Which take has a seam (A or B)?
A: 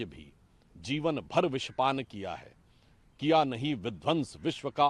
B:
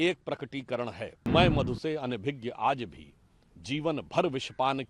B